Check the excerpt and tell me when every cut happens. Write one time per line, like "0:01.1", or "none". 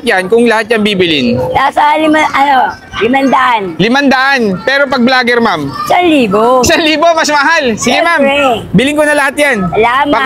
none